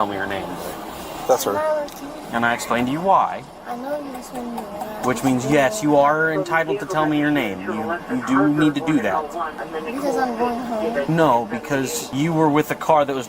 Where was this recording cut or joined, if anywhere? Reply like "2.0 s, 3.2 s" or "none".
2.1 s, 3.5 s, 9.6 s, 11.1 s, 12.0 s